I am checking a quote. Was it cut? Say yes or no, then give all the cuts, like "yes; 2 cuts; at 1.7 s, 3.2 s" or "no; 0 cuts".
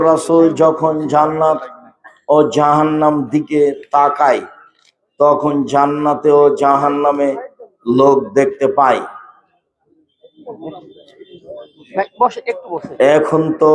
no; 0 cuts